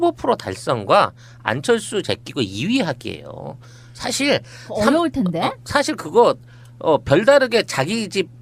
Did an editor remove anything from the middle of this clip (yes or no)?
yes